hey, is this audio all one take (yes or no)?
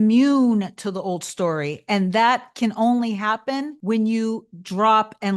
no